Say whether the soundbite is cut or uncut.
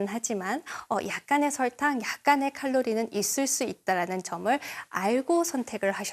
uncut